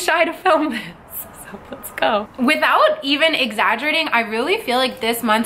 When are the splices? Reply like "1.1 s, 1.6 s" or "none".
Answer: 2.3 s